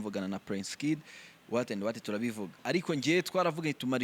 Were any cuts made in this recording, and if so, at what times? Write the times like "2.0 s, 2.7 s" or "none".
2.6 s